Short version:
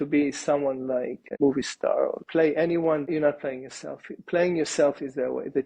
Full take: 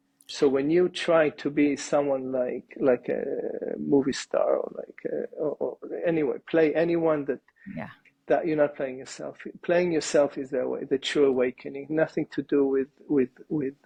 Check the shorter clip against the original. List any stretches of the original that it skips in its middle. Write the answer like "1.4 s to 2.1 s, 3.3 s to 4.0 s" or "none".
2.7 s to 3.7 s, 4.7 s to 6.4 s, 7.3 s to 8.4 s